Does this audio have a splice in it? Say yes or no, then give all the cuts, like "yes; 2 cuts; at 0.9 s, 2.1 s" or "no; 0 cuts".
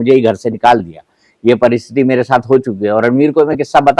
no; 0 cuts